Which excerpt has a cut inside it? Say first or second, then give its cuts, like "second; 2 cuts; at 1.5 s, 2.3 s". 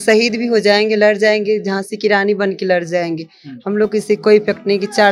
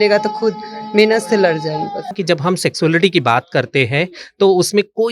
second; 1 cut; at 2.1 s